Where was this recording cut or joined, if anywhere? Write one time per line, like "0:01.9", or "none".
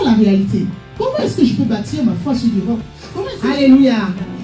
0:03.2

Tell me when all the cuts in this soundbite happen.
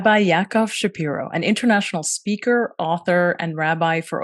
none

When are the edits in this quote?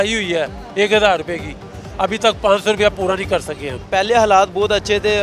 0:03.8

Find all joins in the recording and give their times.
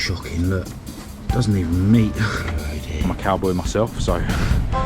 0:02.8

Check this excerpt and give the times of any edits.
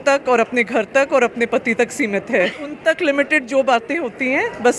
0:02.6

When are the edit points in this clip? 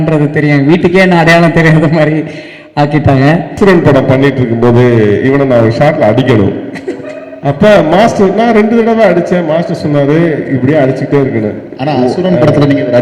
0:03.5

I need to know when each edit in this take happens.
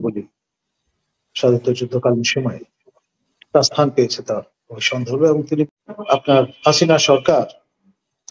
0:05.7

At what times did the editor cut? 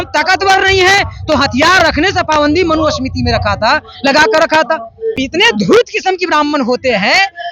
0:05.2

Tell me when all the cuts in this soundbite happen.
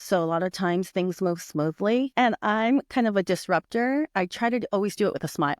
0:02.1

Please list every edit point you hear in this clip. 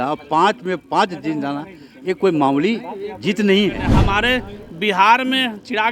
0:03.9

